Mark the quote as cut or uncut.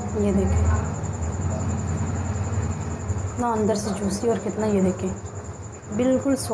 cut